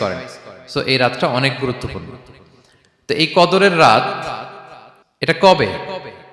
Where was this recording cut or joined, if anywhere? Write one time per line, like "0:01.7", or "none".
0:05.4